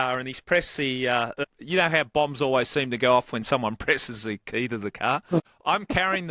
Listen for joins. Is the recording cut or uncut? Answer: cut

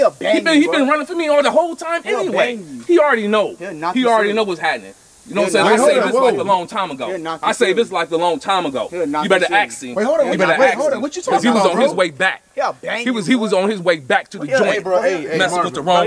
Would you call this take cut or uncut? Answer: uncut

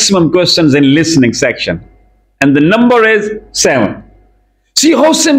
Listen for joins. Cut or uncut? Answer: uncut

